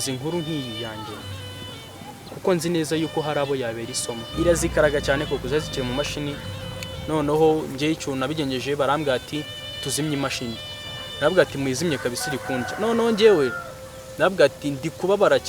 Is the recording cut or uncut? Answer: cut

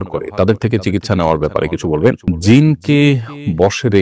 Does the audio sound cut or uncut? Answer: uncut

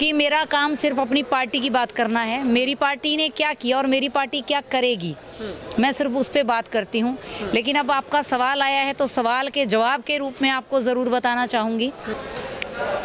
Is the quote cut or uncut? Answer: cut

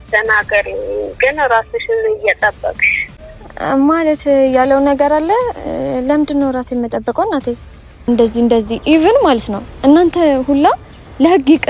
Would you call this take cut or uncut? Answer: cut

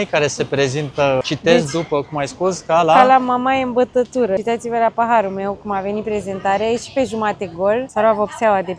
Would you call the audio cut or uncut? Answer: cut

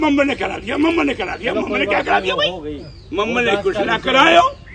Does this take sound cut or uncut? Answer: uncut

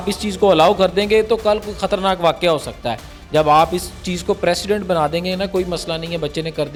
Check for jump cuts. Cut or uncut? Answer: uncut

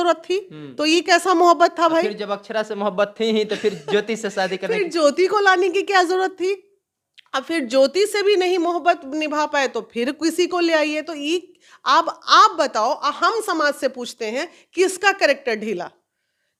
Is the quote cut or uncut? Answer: uncut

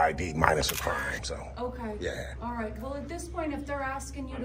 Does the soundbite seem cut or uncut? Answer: uncut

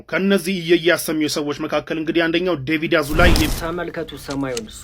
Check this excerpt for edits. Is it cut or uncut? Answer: cut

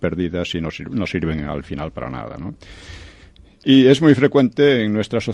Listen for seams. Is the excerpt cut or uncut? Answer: uncut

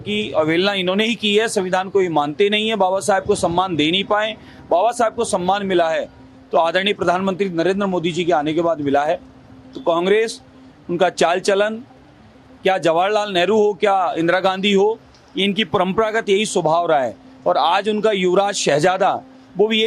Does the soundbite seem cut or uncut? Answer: uncut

